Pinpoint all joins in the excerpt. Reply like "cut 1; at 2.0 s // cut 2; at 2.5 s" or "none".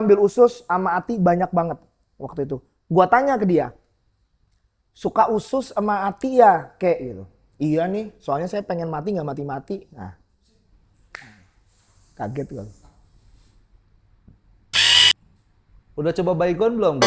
none